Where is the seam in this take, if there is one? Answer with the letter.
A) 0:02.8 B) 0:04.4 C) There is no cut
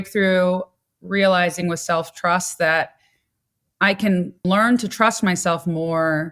B